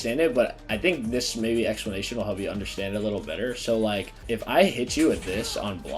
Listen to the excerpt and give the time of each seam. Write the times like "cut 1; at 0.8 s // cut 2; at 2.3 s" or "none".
cut 1; at 4.1 s